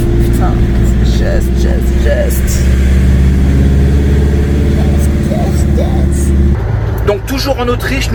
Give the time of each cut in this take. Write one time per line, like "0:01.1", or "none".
none